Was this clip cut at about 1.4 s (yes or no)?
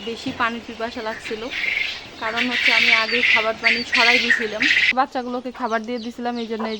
no